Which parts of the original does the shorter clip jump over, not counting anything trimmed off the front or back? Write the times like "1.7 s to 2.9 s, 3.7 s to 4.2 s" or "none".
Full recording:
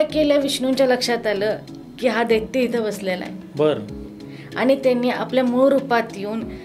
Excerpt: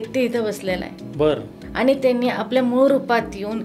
4.0 s to 4.4 s